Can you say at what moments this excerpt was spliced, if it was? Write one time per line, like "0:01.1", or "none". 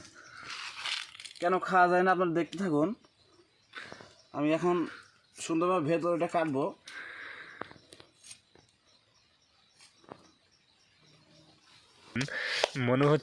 0:12.1